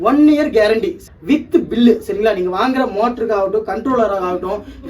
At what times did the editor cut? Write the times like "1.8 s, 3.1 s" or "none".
1.0 s